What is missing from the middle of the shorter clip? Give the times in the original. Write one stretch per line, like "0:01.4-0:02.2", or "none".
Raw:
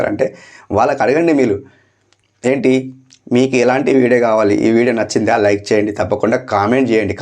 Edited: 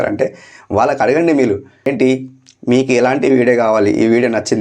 0:01.9-0:02.5